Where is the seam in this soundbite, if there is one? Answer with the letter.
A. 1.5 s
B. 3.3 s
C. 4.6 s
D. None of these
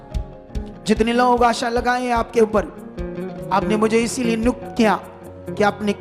B